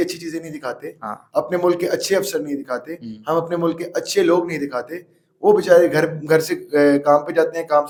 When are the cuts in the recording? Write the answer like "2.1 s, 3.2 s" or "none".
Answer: none